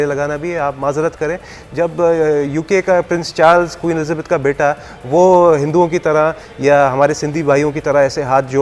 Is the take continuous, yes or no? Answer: yes